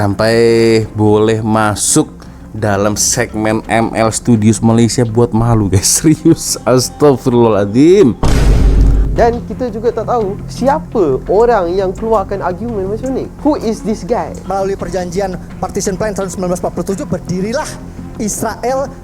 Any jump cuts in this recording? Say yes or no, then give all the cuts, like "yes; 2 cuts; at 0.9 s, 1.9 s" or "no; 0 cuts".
yes; 1 cut; at 9.0 s